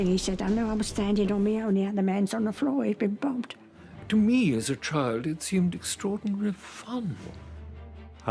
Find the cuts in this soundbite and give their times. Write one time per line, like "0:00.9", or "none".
0:07.2